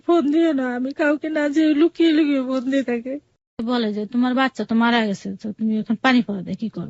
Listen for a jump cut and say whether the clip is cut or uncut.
cut